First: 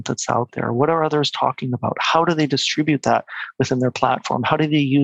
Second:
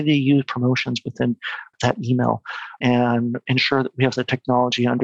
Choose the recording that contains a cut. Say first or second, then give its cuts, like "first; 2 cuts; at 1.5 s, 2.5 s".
second; 3 cuts; at 1.7 s, 2.8 s, 3.4 s